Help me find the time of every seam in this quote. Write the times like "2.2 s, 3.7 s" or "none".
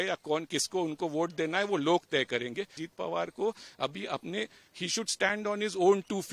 2.8 s